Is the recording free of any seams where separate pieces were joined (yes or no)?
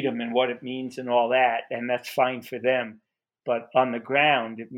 yes